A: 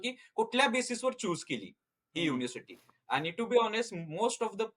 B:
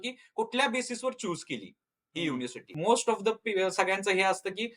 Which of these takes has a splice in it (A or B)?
B